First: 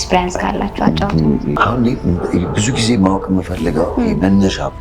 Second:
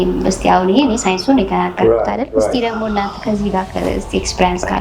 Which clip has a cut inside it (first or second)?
first